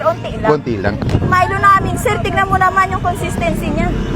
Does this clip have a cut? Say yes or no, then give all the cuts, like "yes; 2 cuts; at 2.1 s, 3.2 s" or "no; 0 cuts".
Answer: yes; 1 cut; at 1.0 s